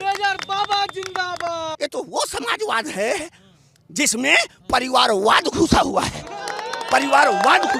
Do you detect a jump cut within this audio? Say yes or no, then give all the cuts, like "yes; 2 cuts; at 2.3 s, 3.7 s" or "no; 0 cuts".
yes; 1 cut; at 1.7 s